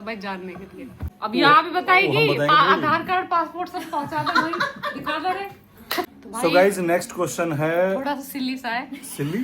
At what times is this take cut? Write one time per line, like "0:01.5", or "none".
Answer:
0:01.0
0:06.1